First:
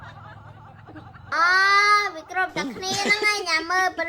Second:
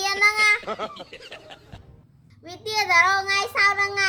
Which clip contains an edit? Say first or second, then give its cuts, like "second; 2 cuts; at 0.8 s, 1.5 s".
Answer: first; 1 cut; at 1.3 s